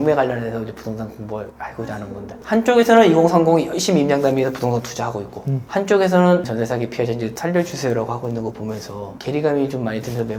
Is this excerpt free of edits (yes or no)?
yes